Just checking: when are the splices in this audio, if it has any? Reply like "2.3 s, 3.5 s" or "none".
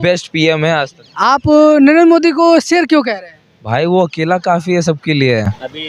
none